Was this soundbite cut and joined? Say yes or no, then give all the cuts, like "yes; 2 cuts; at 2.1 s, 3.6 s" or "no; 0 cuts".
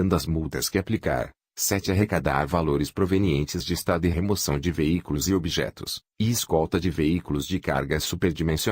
yes; 1 cut; at 1.4 s